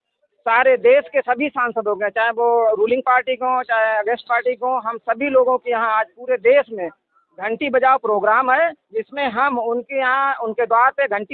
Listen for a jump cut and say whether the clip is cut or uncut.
uncut